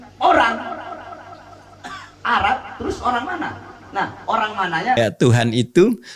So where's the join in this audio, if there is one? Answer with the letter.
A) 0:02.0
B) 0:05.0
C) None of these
B